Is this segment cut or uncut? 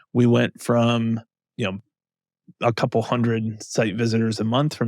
uncut